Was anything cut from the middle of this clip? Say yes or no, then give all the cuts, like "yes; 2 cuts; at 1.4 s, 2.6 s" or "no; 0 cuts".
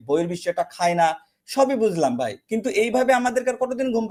no; 0 cuts